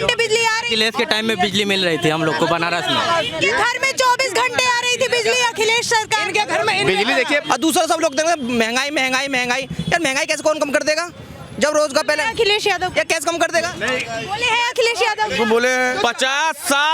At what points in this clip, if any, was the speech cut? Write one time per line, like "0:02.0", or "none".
0:07.4
0:13.7
0:15.9